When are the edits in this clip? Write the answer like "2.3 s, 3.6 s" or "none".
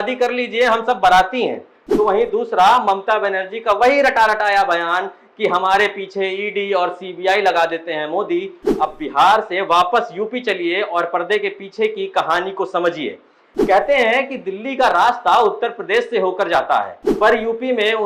8.8 s, 17.0 s